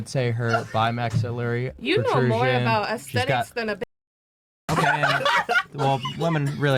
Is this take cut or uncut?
uncut